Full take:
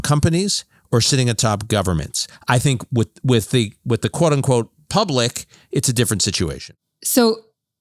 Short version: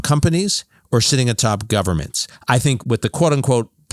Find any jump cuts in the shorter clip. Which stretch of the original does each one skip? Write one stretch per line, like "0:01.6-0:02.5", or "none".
0:02.8-0:03.8